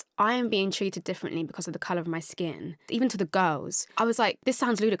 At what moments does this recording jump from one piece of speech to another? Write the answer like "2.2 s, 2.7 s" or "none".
2.8 s, 4.2 s